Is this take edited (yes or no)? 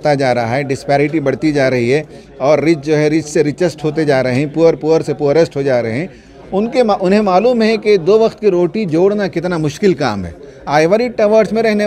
yes